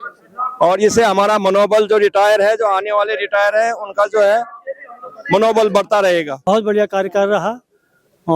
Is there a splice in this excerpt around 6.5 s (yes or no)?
yes